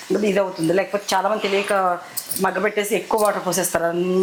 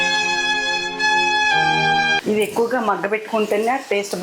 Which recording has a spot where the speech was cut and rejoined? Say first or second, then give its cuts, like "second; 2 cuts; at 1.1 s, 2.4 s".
second; 1 cut; at 2.2 s